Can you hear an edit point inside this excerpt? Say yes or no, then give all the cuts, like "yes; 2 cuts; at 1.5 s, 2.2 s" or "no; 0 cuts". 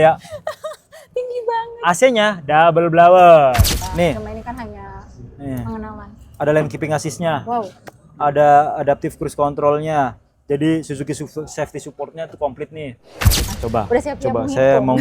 yes; 2 cuts; at 3.8 s, 13.5 s